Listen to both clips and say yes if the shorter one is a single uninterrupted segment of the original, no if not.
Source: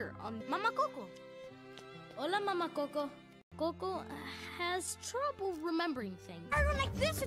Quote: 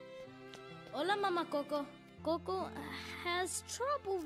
no